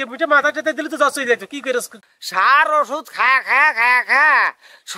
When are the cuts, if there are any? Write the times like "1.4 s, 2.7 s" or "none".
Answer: none